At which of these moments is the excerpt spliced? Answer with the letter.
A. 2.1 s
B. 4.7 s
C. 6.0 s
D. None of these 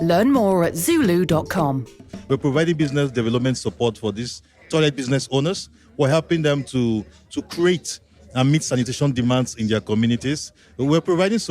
A